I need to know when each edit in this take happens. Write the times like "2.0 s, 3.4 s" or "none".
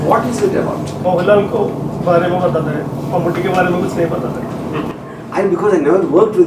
1.0 s